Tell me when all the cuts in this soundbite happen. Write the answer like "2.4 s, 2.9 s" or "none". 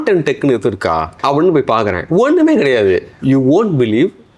1.1 s, 3.1 s